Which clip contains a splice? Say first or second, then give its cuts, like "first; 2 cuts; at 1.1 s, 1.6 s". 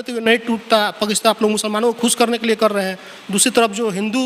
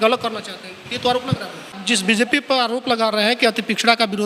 second; 1 cut; at 1.7 s